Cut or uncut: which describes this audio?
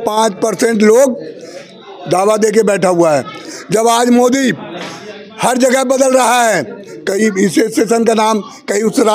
cut